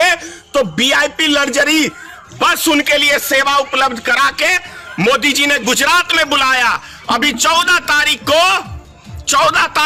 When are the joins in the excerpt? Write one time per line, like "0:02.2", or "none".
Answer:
none